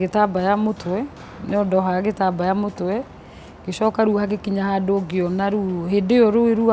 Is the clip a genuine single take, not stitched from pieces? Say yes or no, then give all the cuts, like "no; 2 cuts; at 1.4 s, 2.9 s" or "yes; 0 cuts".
yes; 0 cuts